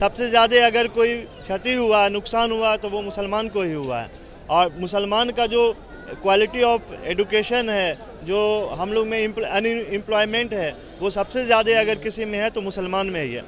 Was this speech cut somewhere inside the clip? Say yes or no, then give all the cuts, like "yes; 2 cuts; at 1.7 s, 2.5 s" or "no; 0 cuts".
no; 0 cuts